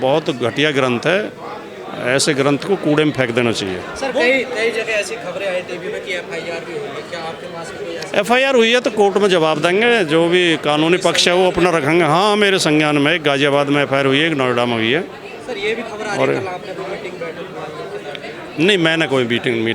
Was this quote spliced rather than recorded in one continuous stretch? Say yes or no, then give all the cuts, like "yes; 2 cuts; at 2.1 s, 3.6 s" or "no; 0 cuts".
no; 0 cuts